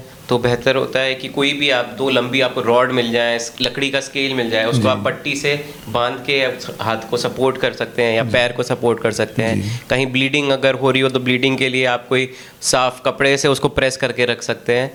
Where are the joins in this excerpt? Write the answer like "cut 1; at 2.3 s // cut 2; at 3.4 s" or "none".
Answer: none